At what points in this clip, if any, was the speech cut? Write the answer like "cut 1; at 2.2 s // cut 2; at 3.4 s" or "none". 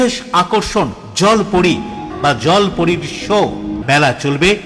cut 1; at 2.1 s // cut 2; at 3.8 s